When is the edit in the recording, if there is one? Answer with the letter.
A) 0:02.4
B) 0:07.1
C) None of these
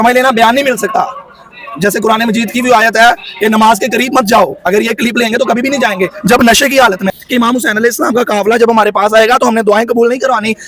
B